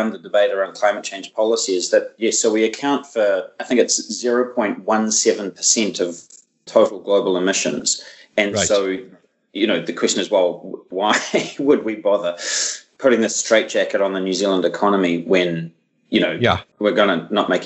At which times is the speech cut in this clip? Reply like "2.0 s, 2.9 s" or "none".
none